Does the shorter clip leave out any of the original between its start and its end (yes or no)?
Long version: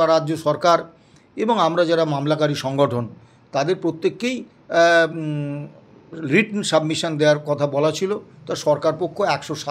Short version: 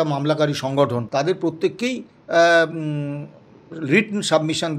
yes